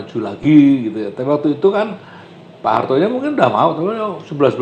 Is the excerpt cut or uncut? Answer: uncut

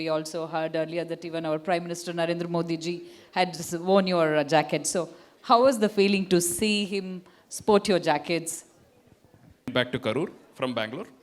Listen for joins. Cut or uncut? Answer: cut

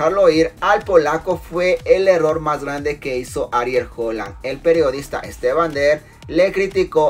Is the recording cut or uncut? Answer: uncut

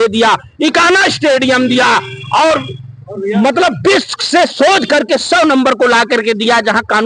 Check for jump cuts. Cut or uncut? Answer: uncut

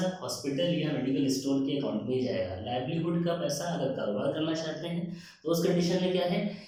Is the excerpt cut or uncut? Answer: uncut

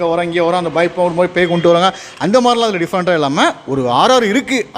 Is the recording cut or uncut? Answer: uncut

